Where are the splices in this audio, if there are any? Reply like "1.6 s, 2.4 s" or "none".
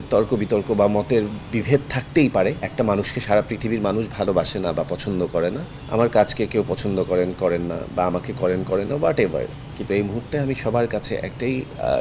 2.6 s, 5.7 s

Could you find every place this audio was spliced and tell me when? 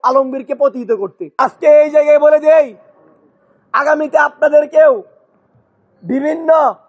1.2 s

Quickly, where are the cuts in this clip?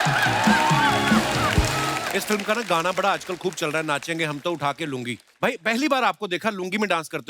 1.9 s

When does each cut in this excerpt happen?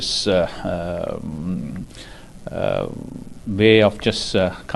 none

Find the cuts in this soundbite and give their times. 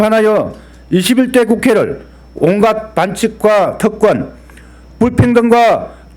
2.3 s

